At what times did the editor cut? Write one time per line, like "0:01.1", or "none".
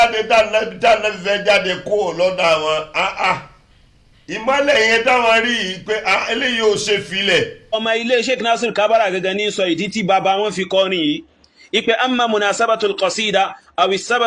0:07.8